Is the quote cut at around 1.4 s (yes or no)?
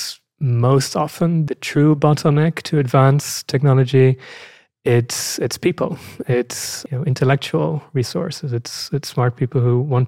yes